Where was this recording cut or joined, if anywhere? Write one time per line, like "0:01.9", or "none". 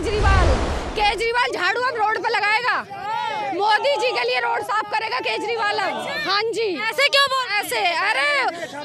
none